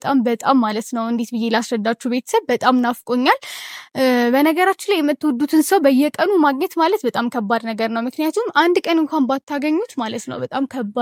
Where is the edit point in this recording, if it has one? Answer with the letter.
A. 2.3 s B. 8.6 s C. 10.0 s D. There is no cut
D